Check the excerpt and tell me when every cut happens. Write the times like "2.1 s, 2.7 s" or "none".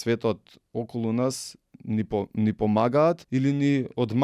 3.2 s